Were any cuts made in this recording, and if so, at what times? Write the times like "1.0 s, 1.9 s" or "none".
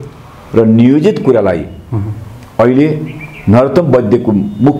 none